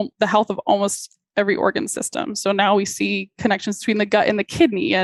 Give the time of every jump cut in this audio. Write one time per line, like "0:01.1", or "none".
none